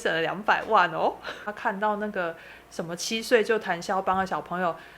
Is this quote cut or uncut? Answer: cut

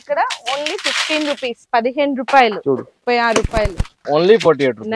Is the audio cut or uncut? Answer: cut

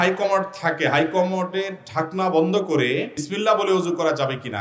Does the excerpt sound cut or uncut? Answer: cut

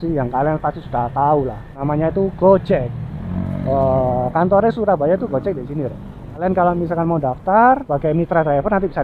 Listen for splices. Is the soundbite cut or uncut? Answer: cut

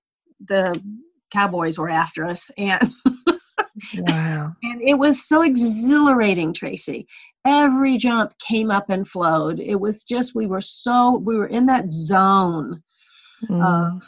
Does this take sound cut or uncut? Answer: uncut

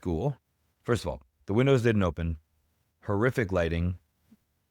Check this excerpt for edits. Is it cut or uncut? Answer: uncut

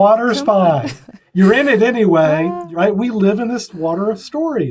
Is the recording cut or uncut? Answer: cut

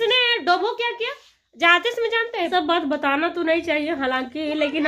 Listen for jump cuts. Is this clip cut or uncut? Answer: cut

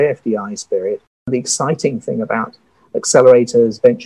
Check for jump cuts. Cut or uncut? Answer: cut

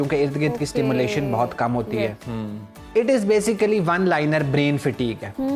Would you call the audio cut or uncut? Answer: uncut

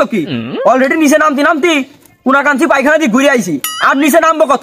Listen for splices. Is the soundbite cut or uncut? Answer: uncut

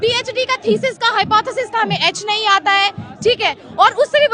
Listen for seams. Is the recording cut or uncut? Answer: uncut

